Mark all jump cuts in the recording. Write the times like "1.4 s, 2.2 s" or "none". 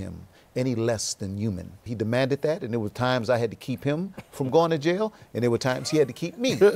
1.8 s